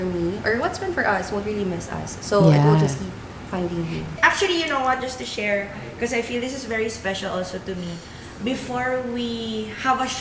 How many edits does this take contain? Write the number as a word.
zero